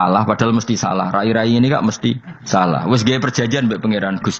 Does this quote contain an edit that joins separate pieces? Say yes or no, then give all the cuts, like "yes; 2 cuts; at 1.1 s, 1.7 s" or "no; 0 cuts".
yes; 1 cut; at 2.3 s